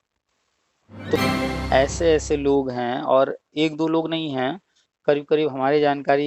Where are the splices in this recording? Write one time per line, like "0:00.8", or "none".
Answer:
0:01.2